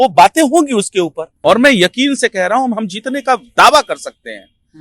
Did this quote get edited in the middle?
yes; 1 cut; at 1.2 s

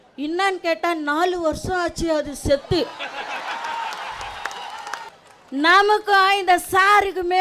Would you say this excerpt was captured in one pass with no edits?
no; 1 cut; at 5.1 s

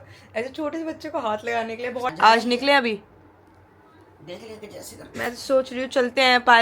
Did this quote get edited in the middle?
yes; 1 cut; at 2.1 s

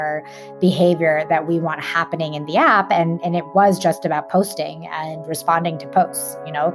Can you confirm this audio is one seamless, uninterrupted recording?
yes; 0 cuts

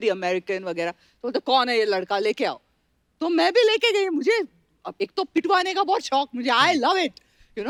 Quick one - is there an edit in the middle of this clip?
no; 0 cuts

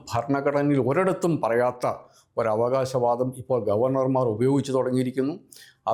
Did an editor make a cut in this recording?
no; 0 cuts

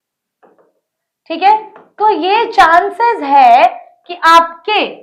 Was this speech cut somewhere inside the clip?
no; 0 cuts

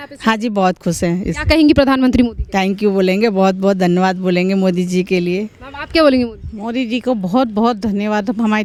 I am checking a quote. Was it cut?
no; 0 cuts

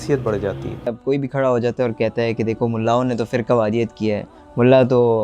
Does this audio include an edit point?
yes; 1 cut; at 1.0 s

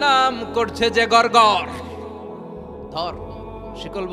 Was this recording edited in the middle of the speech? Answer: no; 0 cuts

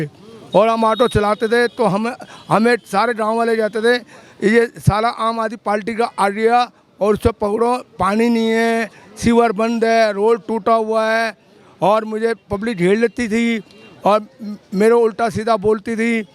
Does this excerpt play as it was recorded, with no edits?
yes; 0 cuts

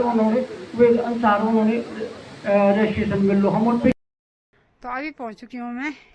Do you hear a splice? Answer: yes; 1 cut; at 4.0 s

